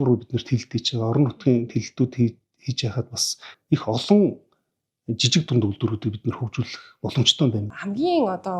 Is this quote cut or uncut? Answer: cut